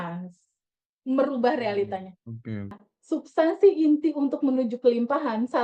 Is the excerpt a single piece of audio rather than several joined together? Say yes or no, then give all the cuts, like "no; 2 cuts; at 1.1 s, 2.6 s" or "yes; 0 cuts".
no; 1 cut; at 2.9 s